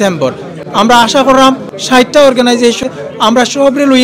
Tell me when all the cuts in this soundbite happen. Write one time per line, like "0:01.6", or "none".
0:01.7
0:02.8